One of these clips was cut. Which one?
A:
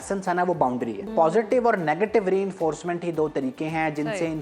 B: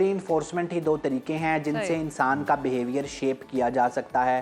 A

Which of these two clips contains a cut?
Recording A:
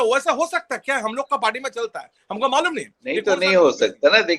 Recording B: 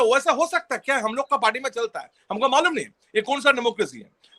A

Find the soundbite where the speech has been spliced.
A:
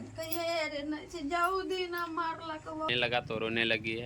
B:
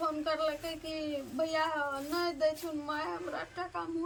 A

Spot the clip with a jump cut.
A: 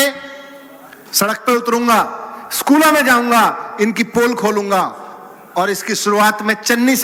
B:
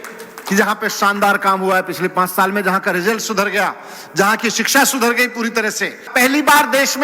B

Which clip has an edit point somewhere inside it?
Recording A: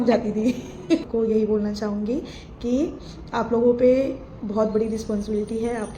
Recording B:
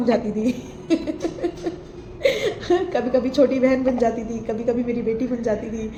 A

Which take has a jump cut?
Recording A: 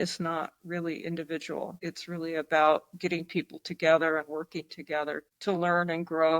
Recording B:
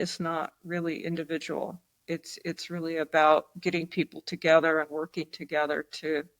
A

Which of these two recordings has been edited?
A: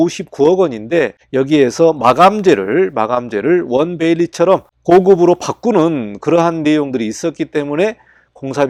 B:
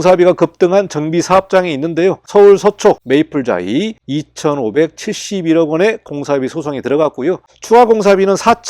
B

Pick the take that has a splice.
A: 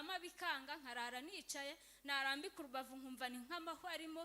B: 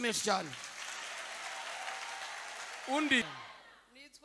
B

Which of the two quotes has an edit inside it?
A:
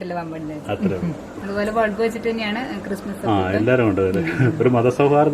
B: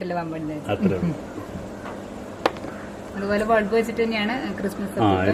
A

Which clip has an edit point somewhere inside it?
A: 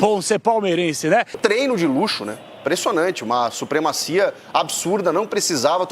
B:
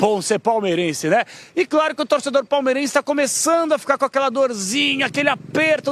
A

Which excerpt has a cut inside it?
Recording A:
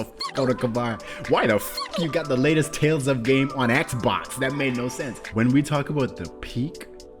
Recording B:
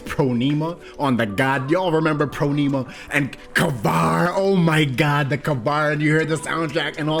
A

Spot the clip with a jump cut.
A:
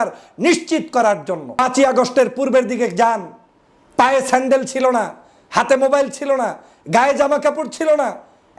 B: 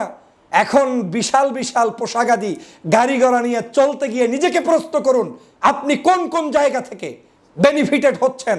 A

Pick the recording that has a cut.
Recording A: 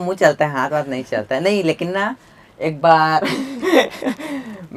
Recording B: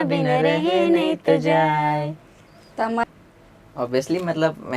B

